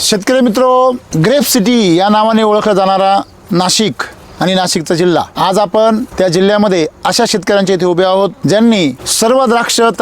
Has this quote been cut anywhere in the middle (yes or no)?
yes